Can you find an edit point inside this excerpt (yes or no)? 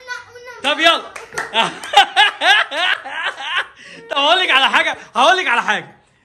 no